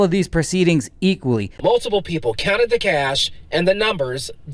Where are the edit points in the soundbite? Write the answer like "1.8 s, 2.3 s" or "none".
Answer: 1.5 s